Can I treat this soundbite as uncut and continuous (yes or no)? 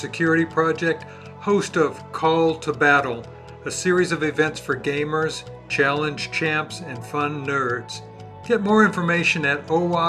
yes